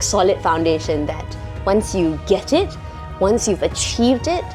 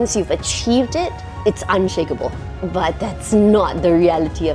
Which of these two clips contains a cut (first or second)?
second